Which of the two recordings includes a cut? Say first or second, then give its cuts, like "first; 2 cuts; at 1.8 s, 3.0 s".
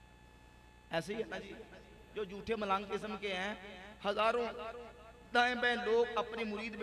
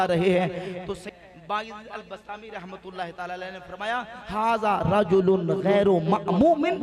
second; 1 cut; at 1.1 s